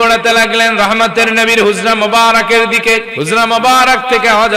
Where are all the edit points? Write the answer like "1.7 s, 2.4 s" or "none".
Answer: 3.1 s